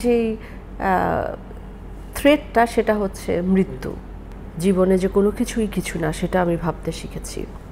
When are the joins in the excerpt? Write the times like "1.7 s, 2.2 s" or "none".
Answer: 4.2 s